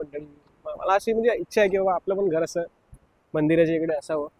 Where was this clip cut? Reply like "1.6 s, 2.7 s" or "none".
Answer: none